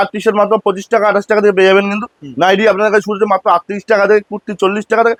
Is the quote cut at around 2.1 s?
no; 0 cuts

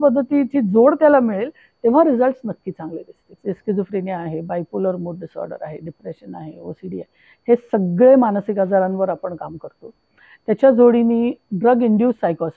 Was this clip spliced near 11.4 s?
yes; 2 cuts; at 3.4 s, 11.4 s

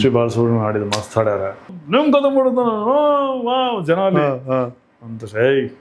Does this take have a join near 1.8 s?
yes; 1 cut; at 1.8 s

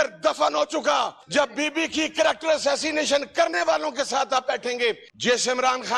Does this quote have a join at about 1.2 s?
yes; 2 cuts; at 1.2 s, 5.1 s

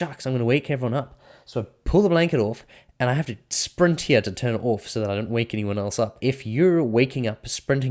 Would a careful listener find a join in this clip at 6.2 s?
yes; 1 cut; at 6.2 s

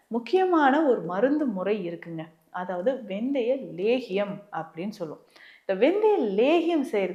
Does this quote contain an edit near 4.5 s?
no; 0 cuts

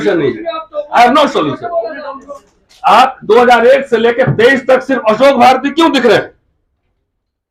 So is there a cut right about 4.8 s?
no; 0 cuts

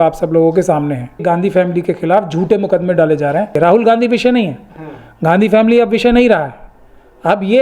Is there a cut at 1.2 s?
yes; 2 cuts; at 1.2 s, 3.5 s

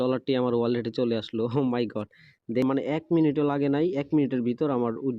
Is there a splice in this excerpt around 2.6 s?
yes; 1 cut; at 2.6 s

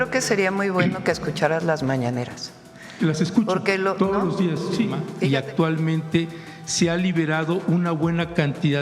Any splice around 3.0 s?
no; 1 cut; at 5.1 s

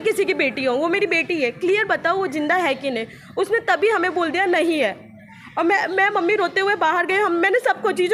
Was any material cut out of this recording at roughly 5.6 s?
no; 0 cuts

